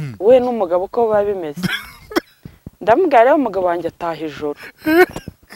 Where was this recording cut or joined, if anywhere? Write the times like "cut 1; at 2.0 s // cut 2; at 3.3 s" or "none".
none